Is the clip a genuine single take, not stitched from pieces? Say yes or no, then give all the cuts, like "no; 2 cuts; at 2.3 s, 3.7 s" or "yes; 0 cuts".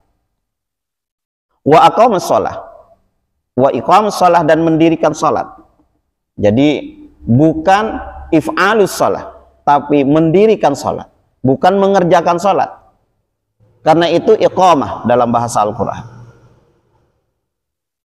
yes; 0 cuts